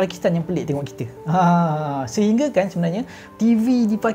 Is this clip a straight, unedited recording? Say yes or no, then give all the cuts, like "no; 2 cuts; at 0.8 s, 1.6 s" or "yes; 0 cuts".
no; 1 cut; at 3.2 s